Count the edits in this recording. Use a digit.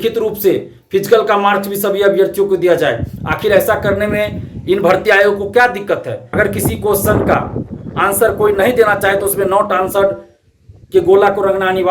1